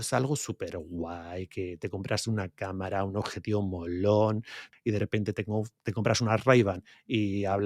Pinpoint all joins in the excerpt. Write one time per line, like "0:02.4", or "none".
0:04.7